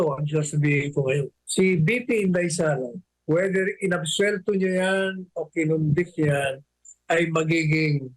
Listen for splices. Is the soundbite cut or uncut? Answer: cut